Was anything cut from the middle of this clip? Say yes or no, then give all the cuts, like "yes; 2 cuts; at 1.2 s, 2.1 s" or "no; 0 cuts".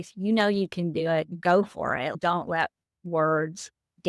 yes; 2 cuts; at 1.3 s, 2.1 s